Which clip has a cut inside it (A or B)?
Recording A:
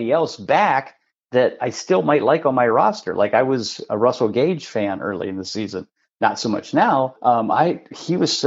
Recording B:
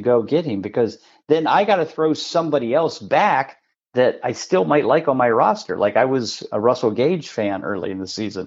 A